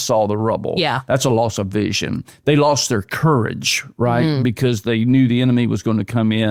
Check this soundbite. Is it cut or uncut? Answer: uncut